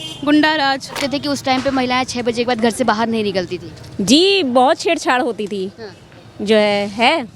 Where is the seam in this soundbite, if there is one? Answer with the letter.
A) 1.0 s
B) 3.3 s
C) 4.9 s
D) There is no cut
A